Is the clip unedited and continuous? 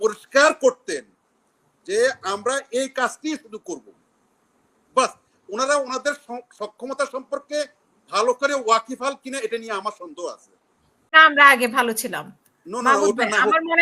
no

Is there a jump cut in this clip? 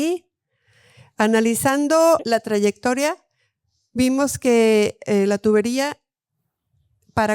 yes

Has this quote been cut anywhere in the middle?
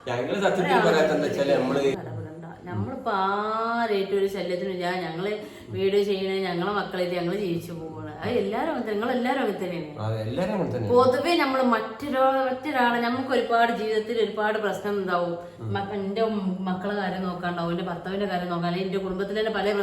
yes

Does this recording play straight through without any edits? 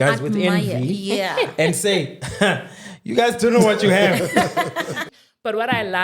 no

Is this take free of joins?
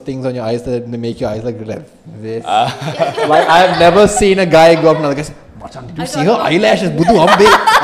yes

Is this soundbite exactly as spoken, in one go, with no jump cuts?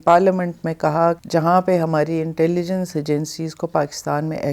no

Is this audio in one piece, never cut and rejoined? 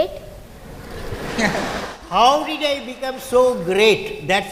yes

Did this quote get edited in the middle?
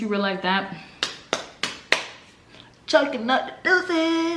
no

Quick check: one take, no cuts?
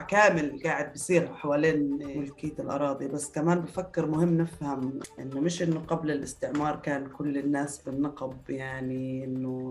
no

